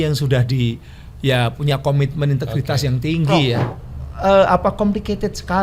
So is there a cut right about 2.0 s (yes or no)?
no